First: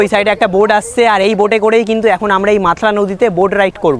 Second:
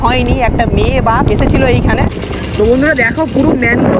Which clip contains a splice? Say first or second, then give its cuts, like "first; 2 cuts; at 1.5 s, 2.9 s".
second; 2 cuts; at 1.3 s, 2.1 s